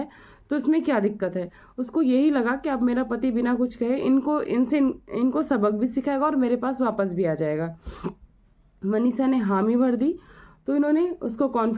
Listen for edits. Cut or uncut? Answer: uncut